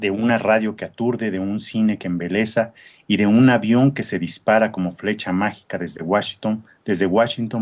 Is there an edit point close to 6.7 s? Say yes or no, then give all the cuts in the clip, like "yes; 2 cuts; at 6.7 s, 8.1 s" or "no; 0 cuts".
yes; 1 cut; at 6.7 s